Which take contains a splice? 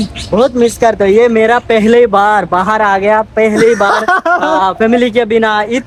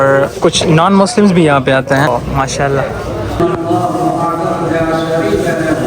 second; 2 cuts; at 2.1 s, 3.4 s

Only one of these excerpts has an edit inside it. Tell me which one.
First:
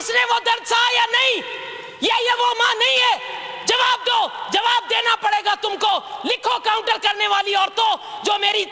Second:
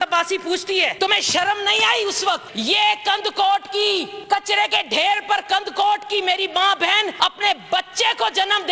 second; 4 cuts; at 0.9 s, 2.5 s, 4.1 s, 7.1 s

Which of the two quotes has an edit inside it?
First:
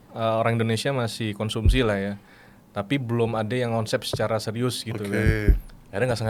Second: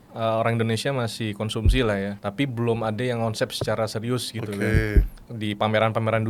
second; 2 cuts; at 2.2 s, 5.3 s

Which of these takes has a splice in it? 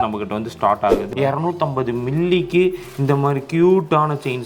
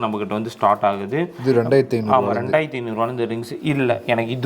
first; 1 cut; at 1.0 s

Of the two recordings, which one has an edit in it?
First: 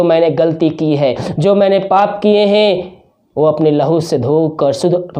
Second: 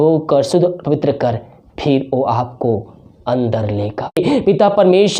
second; 1 cut; at 4.2 s

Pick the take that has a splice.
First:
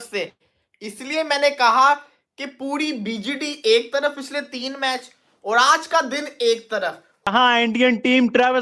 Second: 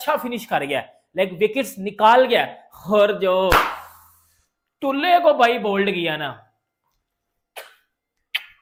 first; 1 cut; at 7.3 s

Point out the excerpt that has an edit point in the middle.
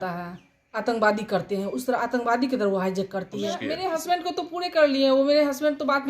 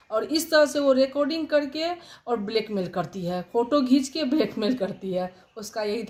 first; 1 cut; at 3.6 s

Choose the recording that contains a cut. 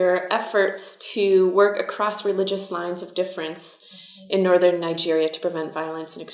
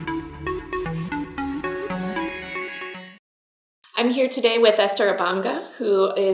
first; 1 cut; at 4.8 s

